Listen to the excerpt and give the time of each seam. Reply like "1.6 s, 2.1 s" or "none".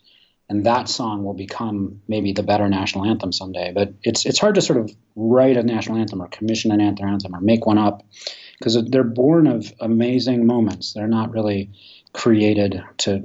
none